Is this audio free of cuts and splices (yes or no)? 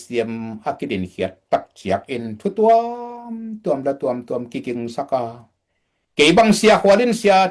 yes